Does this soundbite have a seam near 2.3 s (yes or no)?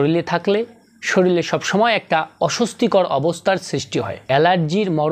no